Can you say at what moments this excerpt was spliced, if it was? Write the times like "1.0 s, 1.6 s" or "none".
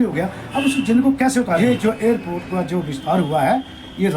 1.6 s